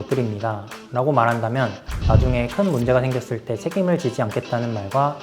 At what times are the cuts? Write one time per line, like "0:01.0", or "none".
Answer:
0:01.9

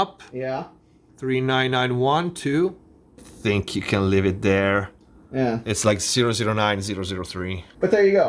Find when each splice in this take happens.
none

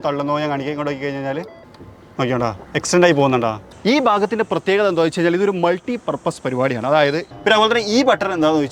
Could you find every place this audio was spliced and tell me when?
0:02.6
0:03.7
0:07.3

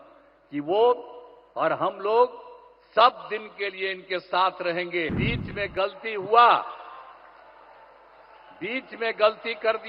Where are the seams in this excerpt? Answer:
0:05.2

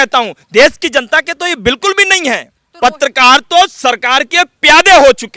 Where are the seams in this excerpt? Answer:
0:02.6

